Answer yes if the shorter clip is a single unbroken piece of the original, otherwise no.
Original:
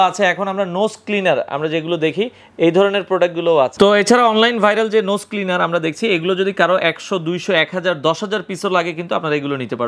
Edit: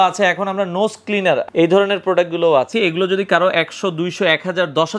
no